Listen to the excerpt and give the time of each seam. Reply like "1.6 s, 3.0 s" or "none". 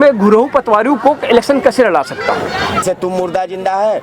2.8 s